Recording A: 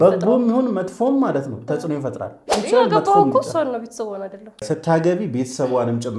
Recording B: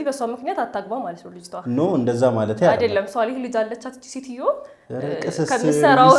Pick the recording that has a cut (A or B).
A